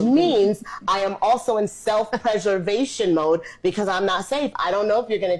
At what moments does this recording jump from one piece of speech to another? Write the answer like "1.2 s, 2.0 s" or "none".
3.4 s